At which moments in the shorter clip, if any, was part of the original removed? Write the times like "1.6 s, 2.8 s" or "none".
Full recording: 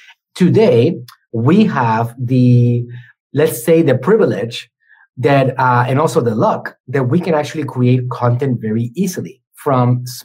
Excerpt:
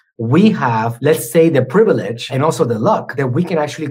0.9 s, 2.3 s, 3.1 s